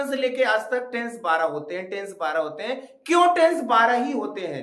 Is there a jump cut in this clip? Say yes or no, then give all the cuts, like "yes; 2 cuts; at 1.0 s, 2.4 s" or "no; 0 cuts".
no; 0 cuts